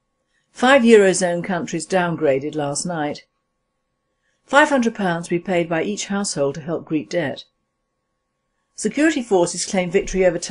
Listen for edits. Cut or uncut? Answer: cut